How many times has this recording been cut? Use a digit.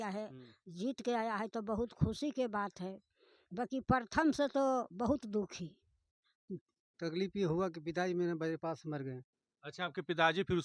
1